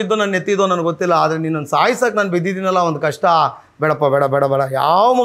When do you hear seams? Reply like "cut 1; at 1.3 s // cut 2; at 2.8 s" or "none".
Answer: none